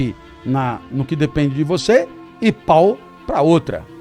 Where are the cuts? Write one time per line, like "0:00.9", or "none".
none